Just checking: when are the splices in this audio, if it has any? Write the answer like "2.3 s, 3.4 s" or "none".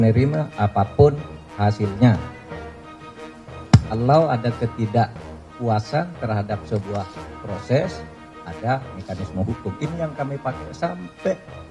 2.2 s, 3.7 s